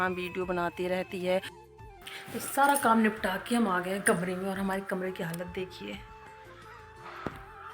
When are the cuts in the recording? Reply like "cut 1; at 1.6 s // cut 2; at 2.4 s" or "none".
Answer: cut 1; at 1.6 s